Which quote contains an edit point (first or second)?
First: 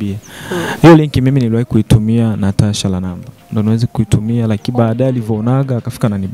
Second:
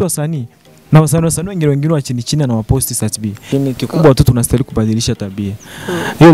second